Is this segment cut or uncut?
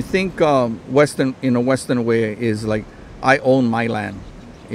uncut